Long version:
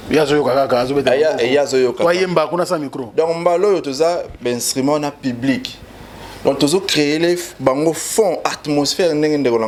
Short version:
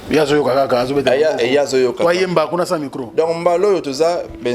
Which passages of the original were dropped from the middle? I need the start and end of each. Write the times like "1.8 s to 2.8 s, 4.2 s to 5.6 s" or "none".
none

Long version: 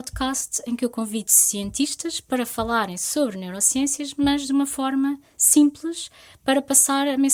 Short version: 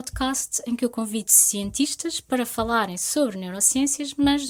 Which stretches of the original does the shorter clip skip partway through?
none

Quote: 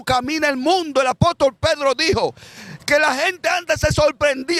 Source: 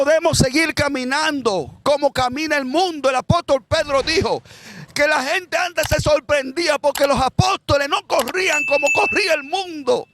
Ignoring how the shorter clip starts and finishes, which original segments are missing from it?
none

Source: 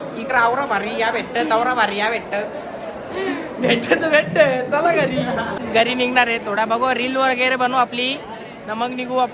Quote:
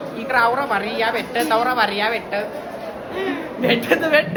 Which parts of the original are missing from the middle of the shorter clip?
none

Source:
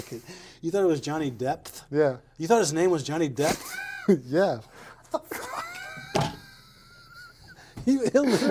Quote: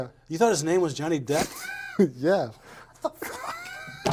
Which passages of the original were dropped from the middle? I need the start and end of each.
none

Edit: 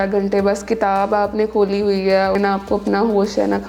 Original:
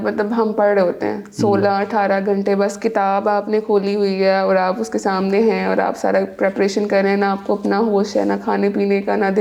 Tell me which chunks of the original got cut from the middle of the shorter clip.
4.5 s to 7.1 s

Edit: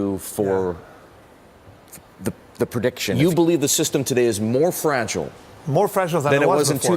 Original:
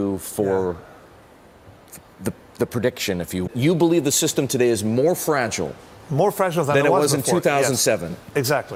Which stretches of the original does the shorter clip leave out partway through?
3.2 s to 3.6 s

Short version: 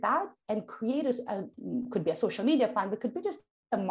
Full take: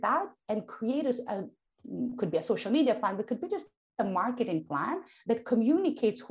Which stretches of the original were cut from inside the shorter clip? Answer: 1.5 s to 1.8 s

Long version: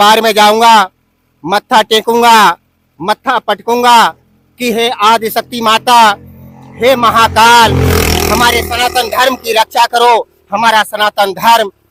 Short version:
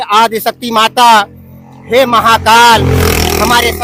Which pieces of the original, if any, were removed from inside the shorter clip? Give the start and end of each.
none

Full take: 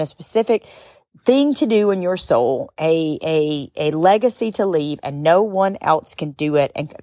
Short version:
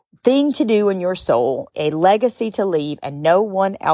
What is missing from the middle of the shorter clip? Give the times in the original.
2.7 s to 3.7 s

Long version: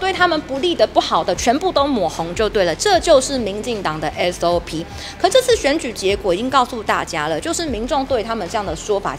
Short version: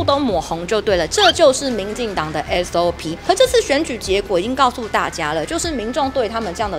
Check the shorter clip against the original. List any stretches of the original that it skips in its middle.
4.8 s to 5.0 s

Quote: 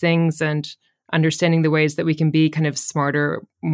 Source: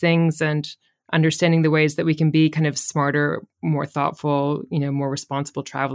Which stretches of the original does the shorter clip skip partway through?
none

